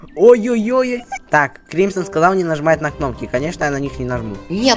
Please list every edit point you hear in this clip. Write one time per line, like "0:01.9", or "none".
0:01.1

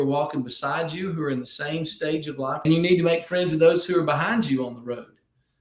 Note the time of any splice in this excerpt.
0:02.6

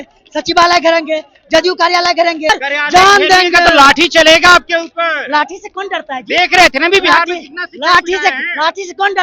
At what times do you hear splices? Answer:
0:02.5

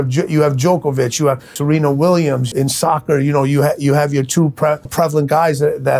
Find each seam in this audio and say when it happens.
0:01.5
0:02.5
0:04.9

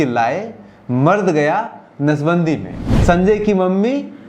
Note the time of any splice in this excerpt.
0:02.8

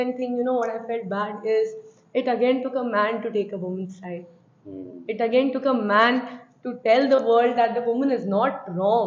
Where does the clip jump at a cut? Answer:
none

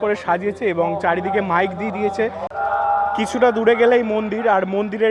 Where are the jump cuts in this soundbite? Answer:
0:02.5

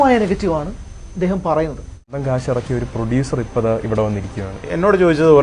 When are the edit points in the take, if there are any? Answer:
0:02.1

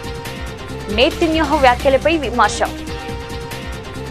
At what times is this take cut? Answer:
0:03.1

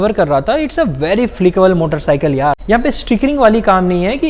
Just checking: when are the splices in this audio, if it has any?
0:02.6

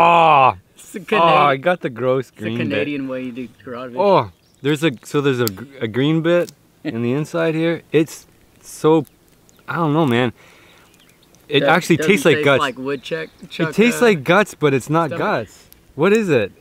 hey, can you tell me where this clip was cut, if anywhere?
none

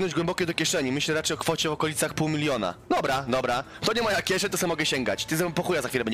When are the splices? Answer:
none

